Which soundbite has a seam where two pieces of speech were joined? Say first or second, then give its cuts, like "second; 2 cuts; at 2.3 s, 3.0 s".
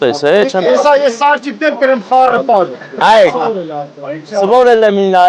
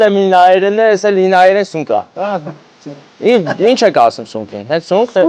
first; 1 cut; at 2.8 s